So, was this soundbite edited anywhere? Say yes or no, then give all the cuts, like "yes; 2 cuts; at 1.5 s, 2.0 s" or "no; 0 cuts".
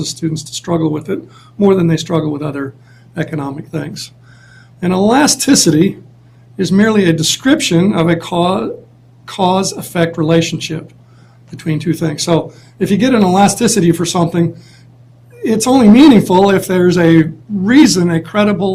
no; 0 cuts